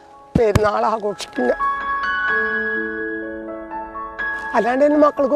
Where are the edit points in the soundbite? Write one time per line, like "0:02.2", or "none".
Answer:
none